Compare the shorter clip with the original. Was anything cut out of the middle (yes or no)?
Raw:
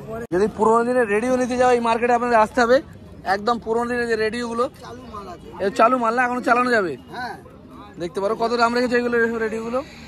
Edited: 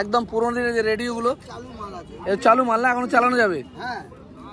no